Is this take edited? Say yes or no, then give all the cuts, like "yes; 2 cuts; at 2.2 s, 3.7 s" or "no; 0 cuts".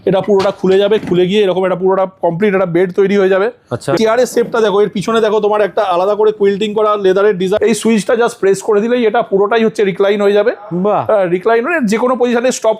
yes; 2 cuts; at 4.0 s, 7.6 s